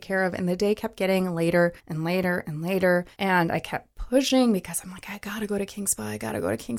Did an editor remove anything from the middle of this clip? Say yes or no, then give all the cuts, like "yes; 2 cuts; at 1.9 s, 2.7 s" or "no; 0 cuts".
yes; 2 cuts; at 1.9 s, 3.1 s